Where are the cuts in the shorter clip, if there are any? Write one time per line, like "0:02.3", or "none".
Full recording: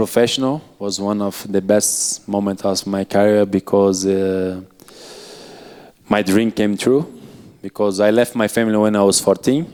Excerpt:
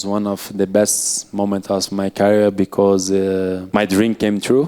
0:03.6